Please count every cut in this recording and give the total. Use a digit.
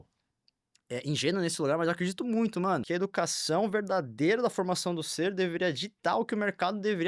1